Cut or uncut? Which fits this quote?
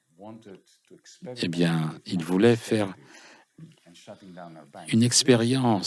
uncut